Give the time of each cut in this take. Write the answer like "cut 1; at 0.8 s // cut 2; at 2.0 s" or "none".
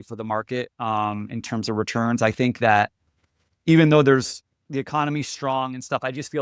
none